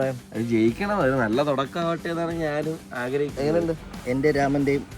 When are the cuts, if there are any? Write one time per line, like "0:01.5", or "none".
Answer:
0:03.8